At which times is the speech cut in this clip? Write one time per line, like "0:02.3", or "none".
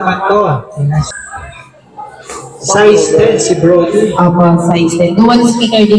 0:01.1